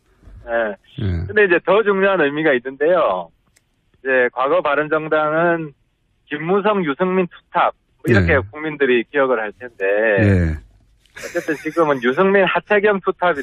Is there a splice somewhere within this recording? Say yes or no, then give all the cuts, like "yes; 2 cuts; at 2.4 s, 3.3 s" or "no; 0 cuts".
no; 0 cuts